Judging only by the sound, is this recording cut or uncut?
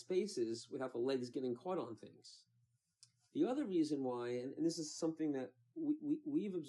uncut